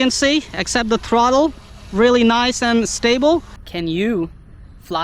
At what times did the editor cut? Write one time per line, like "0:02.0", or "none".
0:03.6